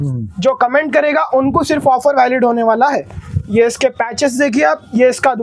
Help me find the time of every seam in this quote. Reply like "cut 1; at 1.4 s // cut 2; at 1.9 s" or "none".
none

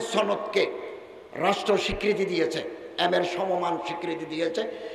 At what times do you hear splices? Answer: none

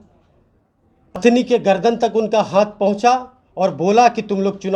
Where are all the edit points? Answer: cut 1; at 1.2 s

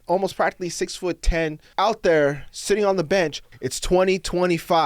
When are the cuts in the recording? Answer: cut 1; at 1.6 s // cut 2; at 3.5 s

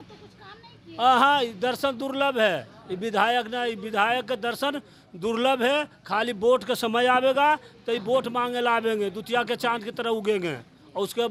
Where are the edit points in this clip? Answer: none

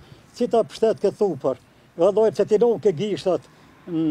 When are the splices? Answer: none

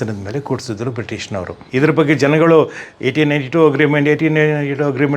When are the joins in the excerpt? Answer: cut 1; at 1.6 s

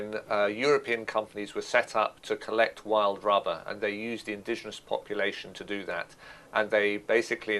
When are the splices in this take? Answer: none

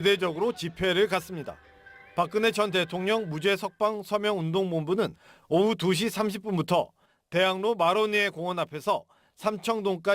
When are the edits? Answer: cut 1; at 8.1 s

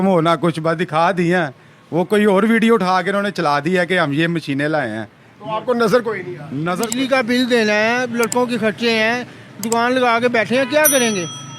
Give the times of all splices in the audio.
cut 1; at 6.8 s

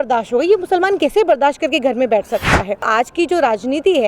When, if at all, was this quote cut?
cut 1; at 2.9 s

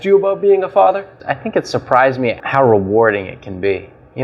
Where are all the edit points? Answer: cut 1; at 1.2 s

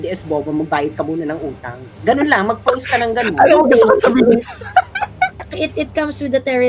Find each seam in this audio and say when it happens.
cut 1; at 5.4 s

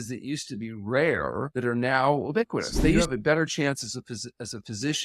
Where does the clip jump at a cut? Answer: cut 1; at 1.5 s // cut 2; at 3.0 s

